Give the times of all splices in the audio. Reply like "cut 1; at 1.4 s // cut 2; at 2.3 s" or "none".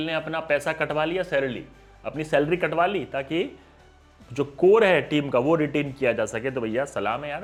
none

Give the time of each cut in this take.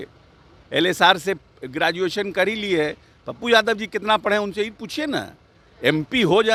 none

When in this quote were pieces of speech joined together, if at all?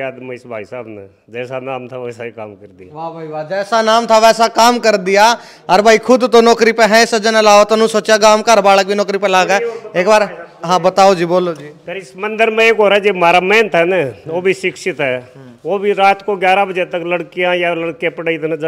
none

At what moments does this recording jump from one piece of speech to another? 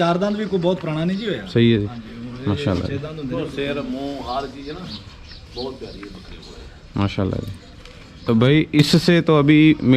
none

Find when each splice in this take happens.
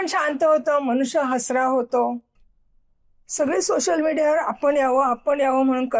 cut 1; at 2.3 s

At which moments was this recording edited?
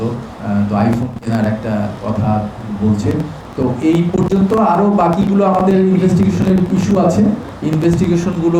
none

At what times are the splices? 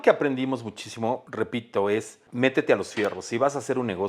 cut 1; at 1.3 s // cut 2; at 2.2 s

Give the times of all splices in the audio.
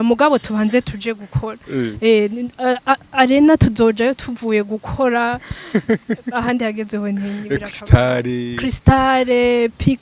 none

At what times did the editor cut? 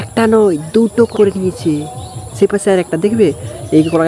cut 1; at 1.1 s

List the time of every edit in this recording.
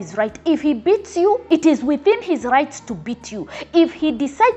cut 1; at 1.4 s

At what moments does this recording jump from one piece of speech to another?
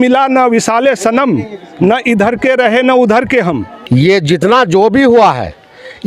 cut 1; at 3.7 s

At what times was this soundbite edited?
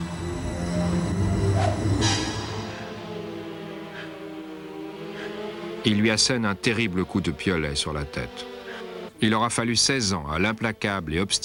none

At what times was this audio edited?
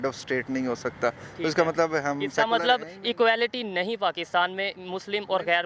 none

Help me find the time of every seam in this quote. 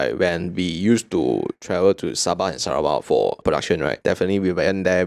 cut 1; at 3.6 s

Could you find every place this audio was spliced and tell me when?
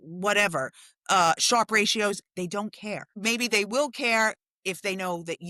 cut 1; at 3.1 s

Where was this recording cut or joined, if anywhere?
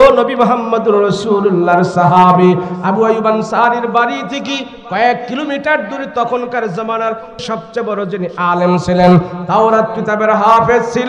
cut 1; at 7.4 s

